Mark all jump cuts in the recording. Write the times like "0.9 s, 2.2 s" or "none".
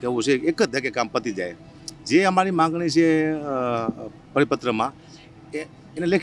none